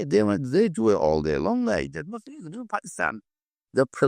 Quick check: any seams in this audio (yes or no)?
no